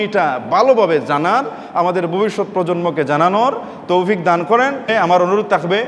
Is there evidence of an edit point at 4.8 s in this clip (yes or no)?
yes